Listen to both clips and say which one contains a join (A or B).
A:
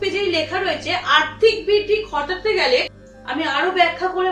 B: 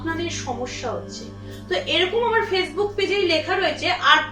A